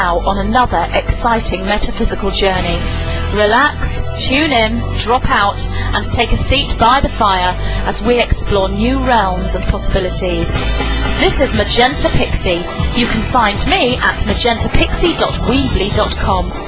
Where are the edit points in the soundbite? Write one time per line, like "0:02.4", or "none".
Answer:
0:12.2